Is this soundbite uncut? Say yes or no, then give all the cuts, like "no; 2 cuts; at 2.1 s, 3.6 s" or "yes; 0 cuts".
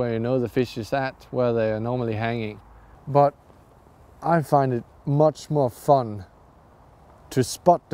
yes; 0 cuts